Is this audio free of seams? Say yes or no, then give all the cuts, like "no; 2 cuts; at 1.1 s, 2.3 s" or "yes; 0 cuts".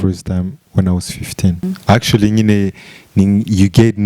no; 1 cut; at 1.6 s